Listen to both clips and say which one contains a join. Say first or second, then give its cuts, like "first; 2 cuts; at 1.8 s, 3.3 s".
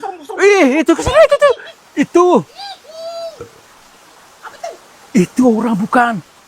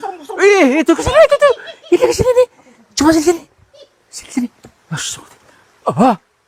first; 1 cut; at 1.7 s